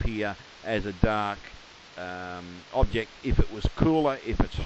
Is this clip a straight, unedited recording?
yes; 0 cuts

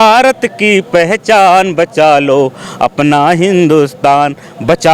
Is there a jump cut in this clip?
no; 0 cuts

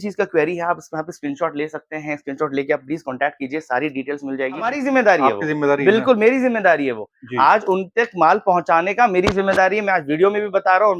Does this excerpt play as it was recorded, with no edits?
no; 1 cut; at 4.7 s

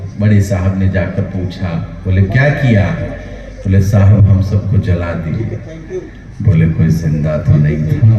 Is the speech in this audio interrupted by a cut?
no; 0 cuts

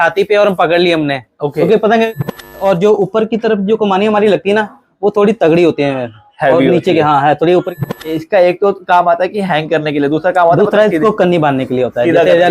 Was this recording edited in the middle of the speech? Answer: yes; 2 cuts; at 2.4 s, 7.8 s

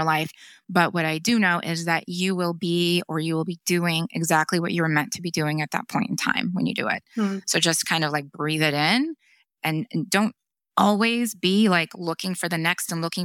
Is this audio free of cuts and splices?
yes; 0 cuts

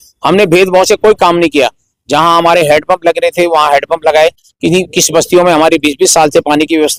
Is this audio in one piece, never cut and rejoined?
yes; 0 cuts

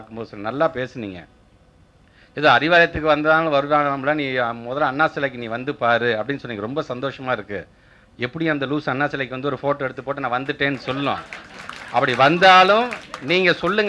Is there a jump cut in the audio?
no; 0 cuts

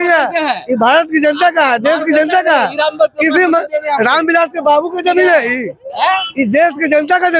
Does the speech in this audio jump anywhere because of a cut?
no; 0 cuts

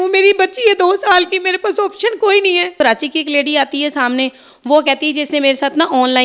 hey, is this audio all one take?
no; 1 cut; at 2.7 s

